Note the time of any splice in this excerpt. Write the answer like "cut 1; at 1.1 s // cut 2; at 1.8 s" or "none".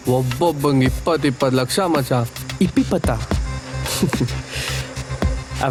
none